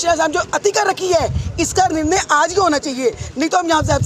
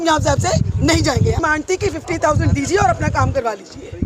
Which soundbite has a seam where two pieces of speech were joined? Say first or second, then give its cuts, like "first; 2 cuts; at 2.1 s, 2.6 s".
second; 1 cut; at 1.4 s